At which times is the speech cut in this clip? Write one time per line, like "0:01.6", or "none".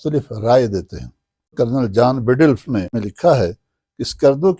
0:01.5
0:03.1